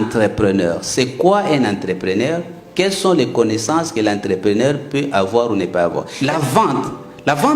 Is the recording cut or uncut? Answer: cut